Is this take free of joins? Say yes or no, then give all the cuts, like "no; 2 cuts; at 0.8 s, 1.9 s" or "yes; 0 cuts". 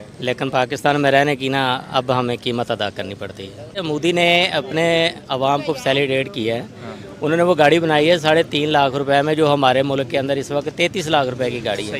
no; 1 cut; at 3.8 s